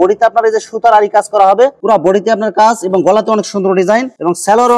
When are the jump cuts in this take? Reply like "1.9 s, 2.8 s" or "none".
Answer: 1.8 s